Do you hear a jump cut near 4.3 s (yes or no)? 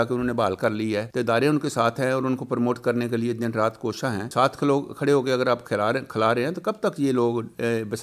yes